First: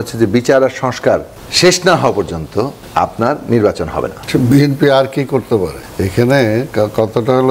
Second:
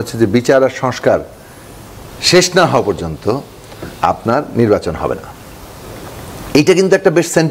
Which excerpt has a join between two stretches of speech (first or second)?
first